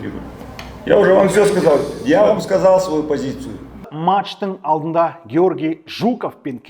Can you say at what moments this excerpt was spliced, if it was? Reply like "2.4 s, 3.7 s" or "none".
3.9 s